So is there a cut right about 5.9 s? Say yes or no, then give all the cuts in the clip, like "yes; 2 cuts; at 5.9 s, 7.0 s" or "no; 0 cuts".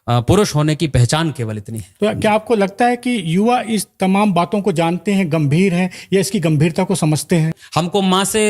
no; 2 cuts; at 1.8 s, 7.6 s